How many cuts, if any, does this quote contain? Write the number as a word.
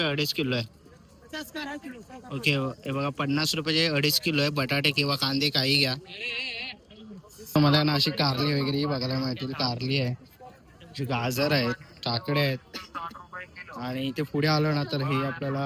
zero